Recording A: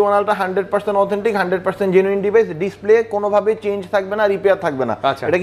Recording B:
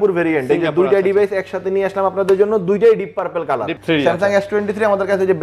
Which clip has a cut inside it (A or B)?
B